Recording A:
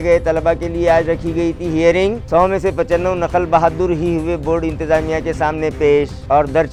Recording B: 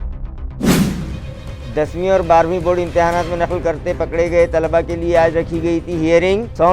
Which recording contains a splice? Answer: B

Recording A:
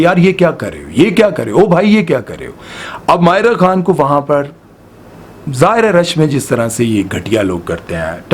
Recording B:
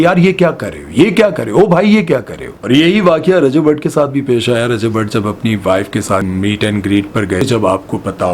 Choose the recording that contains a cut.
B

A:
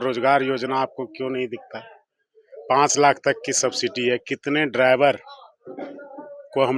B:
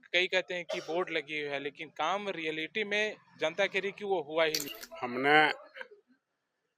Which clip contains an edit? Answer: B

